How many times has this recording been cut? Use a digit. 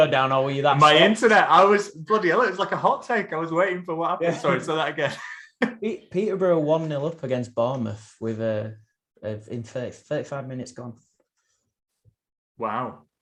0